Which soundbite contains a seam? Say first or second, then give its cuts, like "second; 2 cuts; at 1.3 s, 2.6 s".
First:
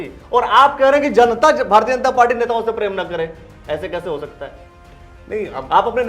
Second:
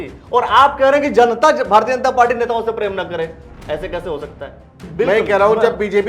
second; 1 cut; at 4.8 s